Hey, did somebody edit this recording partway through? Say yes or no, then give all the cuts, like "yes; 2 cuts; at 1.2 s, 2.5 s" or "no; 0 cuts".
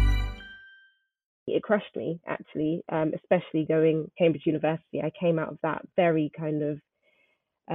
yes; 2 cuts; at 1.4 s, 4.1 s